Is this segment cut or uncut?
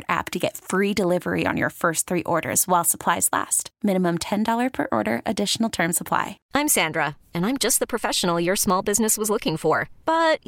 cut